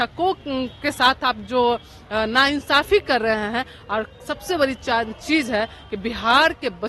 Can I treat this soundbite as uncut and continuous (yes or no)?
yes